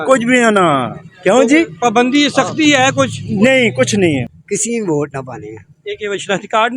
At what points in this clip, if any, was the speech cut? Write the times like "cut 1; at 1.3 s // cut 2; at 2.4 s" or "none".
cut 1; at 4.3 s